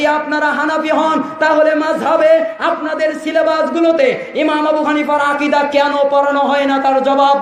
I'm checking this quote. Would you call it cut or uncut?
uncut